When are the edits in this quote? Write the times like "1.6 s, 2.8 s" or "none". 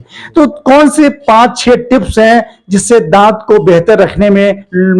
none